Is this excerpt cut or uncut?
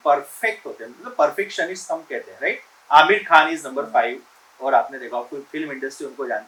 uncut